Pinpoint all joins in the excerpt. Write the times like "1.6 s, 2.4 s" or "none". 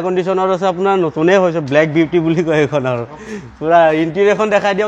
none